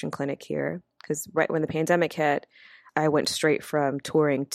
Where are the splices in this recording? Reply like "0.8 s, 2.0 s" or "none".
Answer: 2.8 s